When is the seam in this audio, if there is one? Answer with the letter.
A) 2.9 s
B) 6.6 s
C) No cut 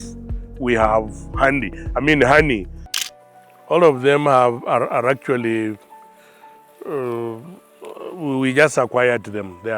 A